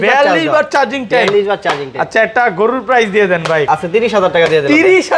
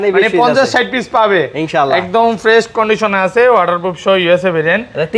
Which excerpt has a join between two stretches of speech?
first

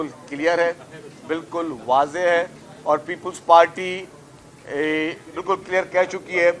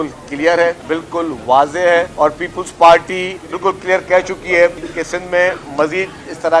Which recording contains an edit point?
second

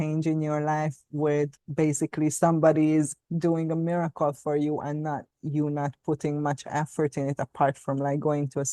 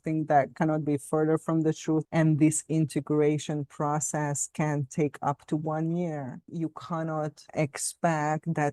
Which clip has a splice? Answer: second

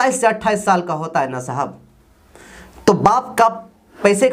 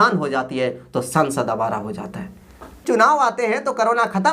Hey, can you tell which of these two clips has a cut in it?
second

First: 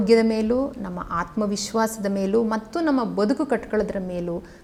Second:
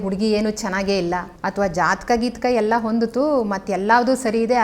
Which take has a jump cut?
second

